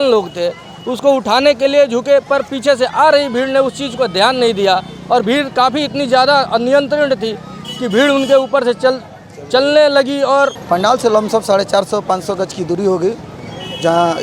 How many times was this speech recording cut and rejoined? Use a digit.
1